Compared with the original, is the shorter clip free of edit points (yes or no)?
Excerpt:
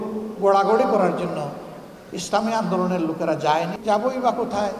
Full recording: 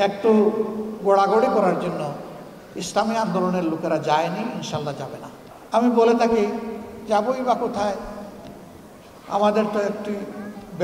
no